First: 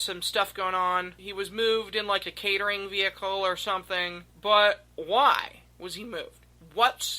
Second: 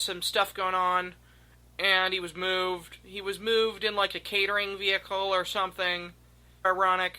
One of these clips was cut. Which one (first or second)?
first